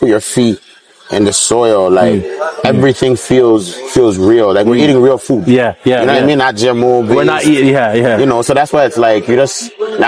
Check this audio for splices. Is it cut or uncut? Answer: uncut